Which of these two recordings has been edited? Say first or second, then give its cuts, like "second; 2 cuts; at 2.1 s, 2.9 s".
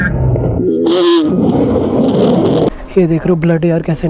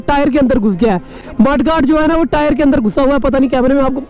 first; 1 cut; at 2.8 s